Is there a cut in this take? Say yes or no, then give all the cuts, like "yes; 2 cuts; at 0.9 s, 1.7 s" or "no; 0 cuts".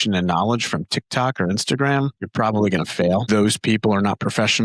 yes; 2 cuts; at 2.2 s, 3.2 s